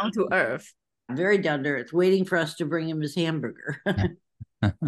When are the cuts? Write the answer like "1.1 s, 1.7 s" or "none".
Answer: 1.1 s